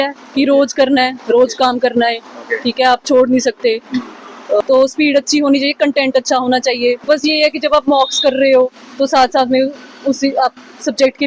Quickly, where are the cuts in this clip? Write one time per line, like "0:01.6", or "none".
0:04.6
0:07.0